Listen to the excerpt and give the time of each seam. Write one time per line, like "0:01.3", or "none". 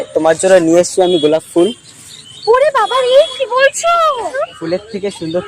0:04.3